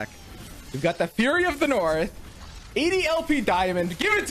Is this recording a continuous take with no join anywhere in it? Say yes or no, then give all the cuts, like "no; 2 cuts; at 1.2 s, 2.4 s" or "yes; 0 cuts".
yes; 0 cuts